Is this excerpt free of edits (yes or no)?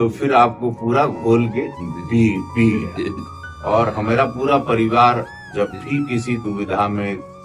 yes